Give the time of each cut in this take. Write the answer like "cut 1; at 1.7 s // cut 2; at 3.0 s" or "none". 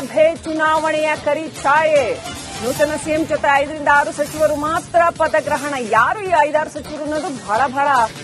cut 1; at 6.4 s